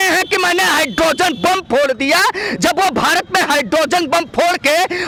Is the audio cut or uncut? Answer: uncut